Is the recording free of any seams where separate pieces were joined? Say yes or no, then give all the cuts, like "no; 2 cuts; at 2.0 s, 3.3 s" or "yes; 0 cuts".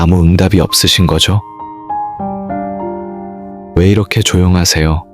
no; 2 cuts; at 1.7 s, 3.7 s